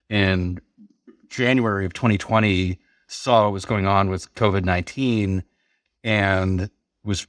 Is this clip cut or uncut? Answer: uncut